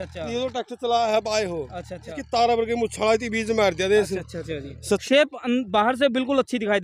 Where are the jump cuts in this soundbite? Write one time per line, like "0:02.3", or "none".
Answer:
0:02.2
0:05.0